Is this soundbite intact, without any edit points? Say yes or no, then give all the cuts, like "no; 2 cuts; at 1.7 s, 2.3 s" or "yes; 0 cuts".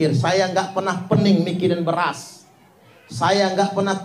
yes; 0 cuts